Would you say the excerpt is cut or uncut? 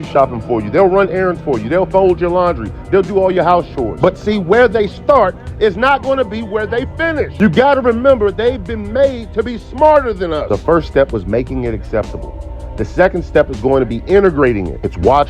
cut